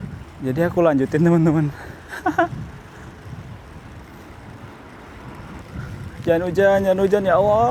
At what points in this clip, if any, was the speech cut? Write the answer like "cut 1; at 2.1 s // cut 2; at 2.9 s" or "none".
cut 1; at 5.6 s